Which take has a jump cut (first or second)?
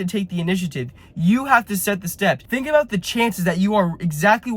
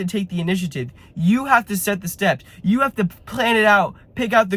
first